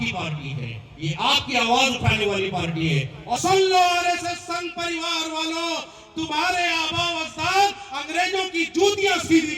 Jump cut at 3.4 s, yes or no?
yes